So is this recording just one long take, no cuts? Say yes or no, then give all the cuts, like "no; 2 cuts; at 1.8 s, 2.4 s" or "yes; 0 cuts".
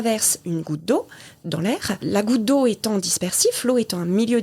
no; 1 cut; at 2.0 s